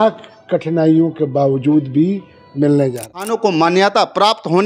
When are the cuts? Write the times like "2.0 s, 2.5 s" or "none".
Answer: 3.3 s

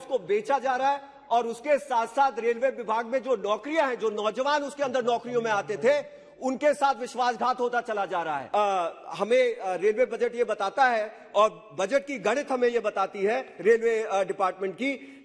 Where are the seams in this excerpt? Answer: 8.4 s

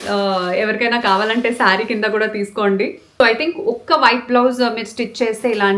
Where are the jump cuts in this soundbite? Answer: 3.0 s

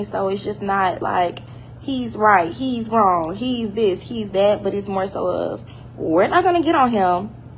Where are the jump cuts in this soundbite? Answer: none

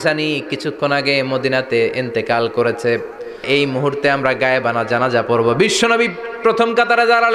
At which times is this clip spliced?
3.4 s

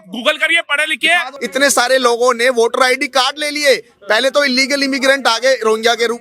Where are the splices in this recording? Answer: 1.3 s

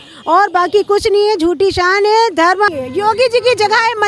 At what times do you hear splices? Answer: 2.7 s

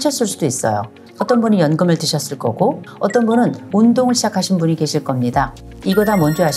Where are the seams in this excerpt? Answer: 1.0 s, 3.6 s, 5.6 s

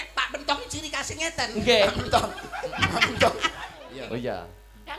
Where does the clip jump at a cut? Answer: 3.8 s

